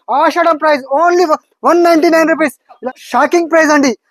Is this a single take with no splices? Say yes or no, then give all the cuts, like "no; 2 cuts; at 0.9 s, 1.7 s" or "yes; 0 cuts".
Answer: no; 1 cut; at 2.9 s